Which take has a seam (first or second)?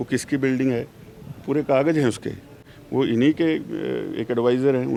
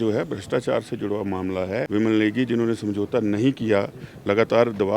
second